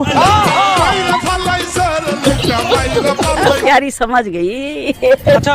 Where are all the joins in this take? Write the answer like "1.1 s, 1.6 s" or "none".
3.6 s

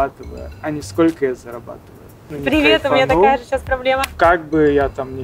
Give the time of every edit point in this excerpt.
2.3 s, 4.1 s

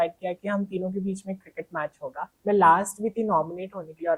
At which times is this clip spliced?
2.3 s

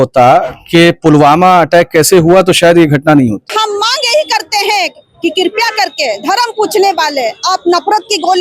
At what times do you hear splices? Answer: 3.5 s

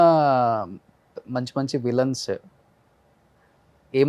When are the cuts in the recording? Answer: none

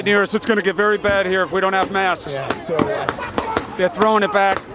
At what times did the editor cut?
none

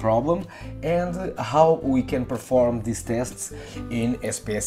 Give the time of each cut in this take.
none

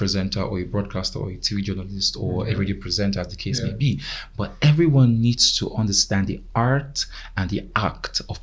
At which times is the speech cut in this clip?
none

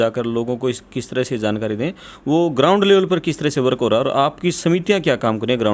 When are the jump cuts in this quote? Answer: none

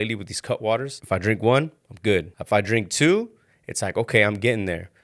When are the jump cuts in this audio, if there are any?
0.9 s, 2.3 s

